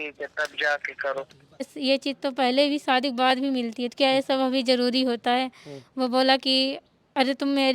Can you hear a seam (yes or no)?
yes